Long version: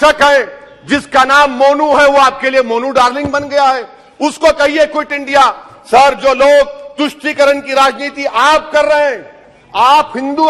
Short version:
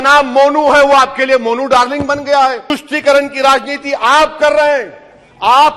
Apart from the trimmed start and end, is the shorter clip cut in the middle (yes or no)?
yes